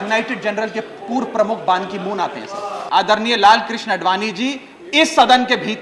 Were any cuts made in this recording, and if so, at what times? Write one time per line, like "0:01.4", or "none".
0:02.8

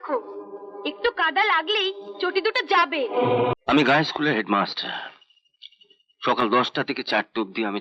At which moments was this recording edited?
0:03.5

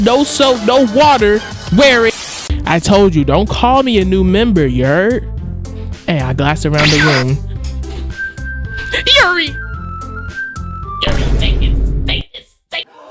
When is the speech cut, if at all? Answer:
0:02.1

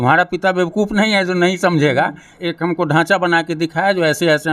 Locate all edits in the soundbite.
0:02.3

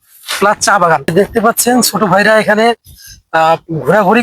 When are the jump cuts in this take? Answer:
0:01.1

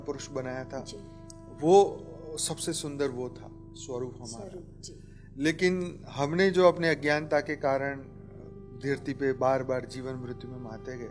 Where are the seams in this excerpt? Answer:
none

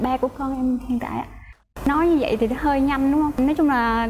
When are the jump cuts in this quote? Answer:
0:01.4

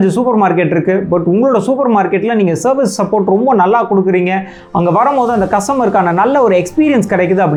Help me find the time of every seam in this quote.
none

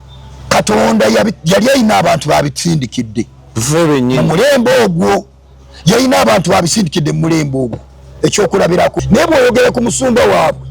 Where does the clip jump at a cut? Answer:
0:09.0

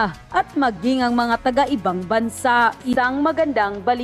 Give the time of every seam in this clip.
0:02.9

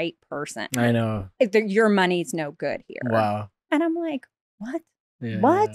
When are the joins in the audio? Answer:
0:03.5

